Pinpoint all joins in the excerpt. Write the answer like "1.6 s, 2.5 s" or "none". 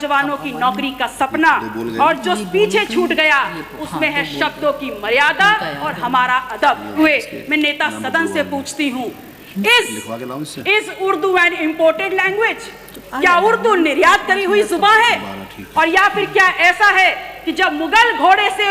6.9 s